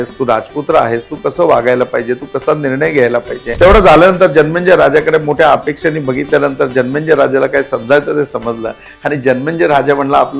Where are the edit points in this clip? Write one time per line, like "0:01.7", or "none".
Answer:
0:03.4